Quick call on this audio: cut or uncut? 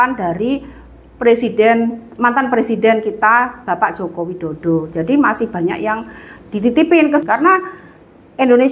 cut